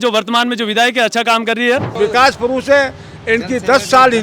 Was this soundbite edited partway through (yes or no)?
yes